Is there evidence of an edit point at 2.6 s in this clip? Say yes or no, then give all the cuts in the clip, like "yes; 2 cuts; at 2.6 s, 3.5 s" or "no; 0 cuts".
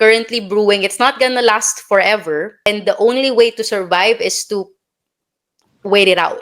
yes; 1 cut; at 2.6 s